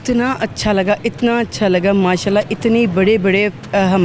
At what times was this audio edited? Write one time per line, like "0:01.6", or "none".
none